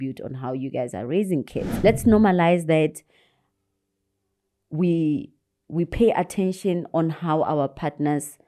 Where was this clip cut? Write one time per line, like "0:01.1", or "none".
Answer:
0:01.6